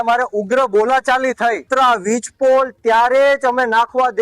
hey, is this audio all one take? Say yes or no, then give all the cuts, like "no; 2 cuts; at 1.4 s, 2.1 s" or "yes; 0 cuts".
no; 1 cut; at 1.7 s